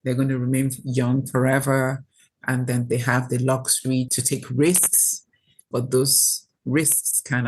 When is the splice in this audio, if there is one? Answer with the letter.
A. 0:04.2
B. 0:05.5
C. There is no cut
A